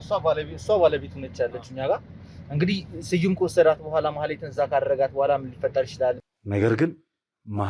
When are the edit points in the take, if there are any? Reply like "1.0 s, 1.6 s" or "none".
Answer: 6.3 s